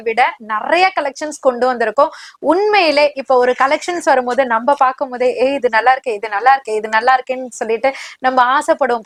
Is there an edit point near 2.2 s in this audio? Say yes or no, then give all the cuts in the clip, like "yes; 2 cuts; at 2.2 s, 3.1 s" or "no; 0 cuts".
no; 0 cuts